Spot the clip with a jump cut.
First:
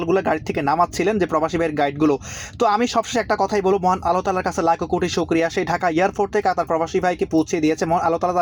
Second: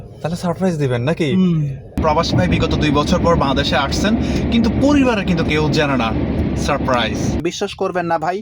second; 2 cuts; at 2.0 s, 7.4 s

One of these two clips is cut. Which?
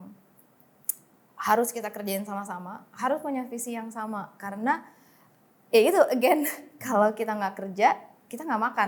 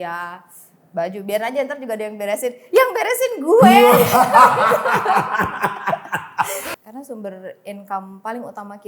second; 1 cut; at 6.7 s

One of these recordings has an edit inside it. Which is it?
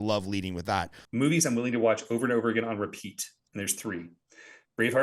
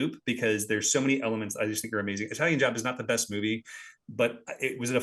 first; 1 cut; at 1.0 s

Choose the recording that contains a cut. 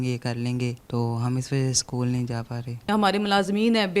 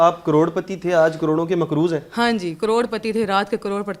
first; 2 cuts; at 0.8 s, 2.9 s

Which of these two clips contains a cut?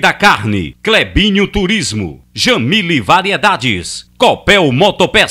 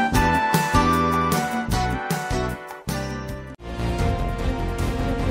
second; 1 cut; at 3.7 s

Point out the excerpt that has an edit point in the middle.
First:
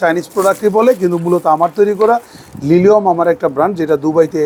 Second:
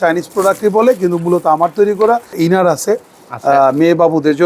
second; 1 cut; at 2.3 s

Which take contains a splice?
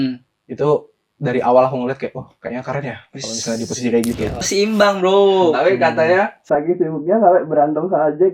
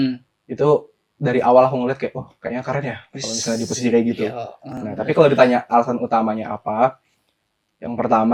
first; 1 cut; at 4.5 s

